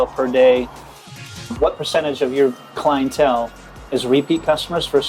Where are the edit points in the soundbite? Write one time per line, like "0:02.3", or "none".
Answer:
0:01.1